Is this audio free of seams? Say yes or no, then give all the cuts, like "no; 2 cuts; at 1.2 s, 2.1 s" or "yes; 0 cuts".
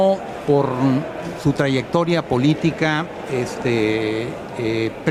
yes; 0 cuts